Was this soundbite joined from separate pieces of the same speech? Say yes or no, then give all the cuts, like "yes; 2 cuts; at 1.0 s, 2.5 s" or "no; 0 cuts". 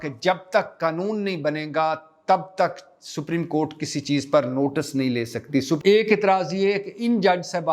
yes; 1 cut; at 5.8 s